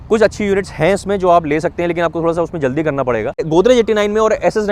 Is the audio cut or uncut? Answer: cut